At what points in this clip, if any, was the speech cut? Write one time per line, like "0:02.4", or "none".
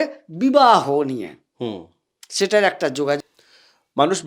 0:03.2